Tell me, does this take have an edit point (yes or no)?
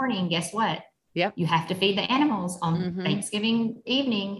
no